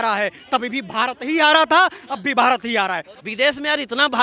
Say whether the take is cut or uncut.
cut